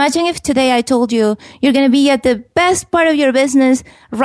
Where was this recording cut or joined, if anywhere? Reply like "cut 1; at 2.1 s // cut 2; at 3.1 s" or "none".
cut 1; at 2.5 s